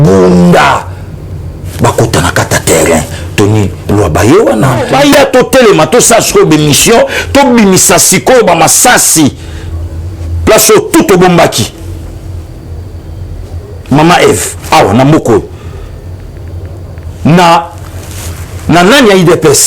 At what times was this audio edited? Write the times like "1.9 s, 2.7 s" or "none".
4.9 s

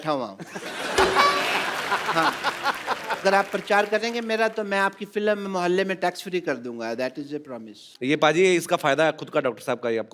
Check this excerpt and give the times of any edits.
none

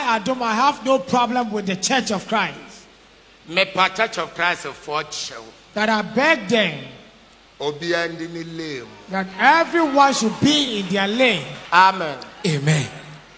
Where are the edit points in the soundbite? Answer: 11.5 s

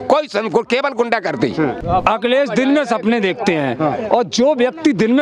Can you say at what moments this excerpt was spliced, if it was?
1.8 s

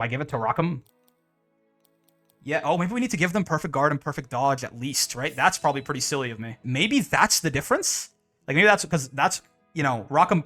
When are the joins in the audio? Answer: 0.9 s, 6.6 s

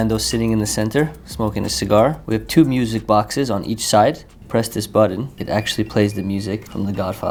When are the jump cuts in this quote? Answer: none

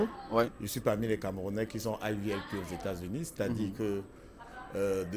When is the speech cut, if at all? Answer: none

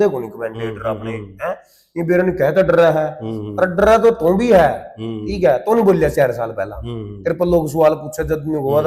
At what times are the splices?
none

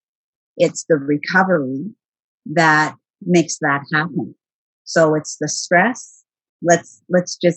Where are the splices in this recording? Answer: 6.5 s

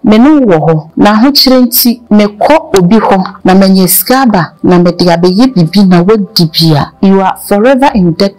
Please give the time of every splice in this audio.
0.9 s, 2.0 s, 3.3 s, 4.5 s, 6.9 s

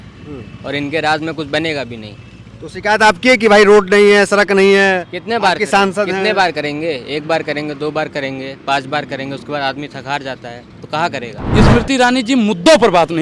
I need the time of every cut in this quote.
11.4 s

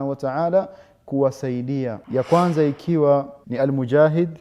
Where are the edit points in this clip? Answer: 2.0 s, 3.4 s

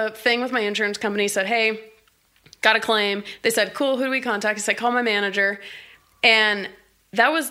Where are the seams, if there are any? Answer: none

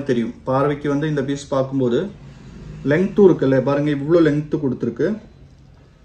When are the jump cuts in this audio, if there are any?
none

